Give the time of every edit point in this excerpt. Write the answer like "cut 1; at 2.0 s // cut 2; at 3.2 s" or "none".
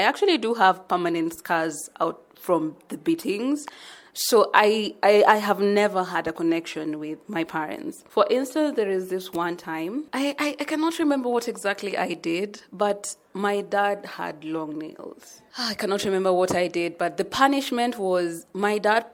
none